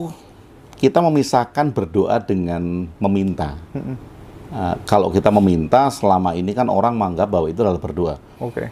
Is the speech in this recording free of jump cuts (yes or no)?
yes